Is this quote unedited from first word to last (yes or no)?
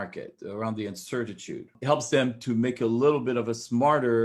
no